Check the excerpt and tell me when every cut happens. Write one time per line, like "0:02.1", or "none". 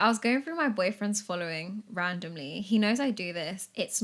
none